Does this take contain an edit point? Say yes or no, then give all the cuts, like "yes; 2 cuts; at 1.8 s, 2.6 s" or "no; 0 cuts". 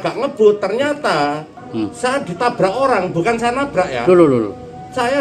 yes; 1 cut; at 1.5 s